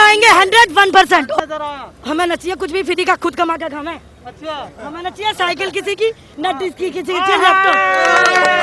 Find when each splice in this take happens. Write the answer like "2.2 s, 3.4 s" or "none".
1.3 s